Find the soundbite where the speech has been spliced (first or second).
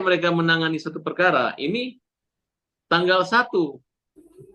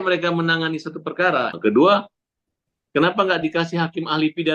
second